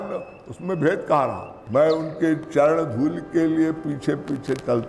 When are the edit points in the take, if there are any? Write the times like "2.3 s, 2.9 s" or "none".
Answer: 1.6 s